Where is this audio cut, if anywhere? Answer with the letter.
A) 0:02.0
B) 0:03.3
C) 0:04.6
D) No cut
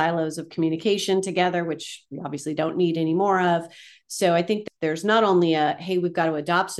C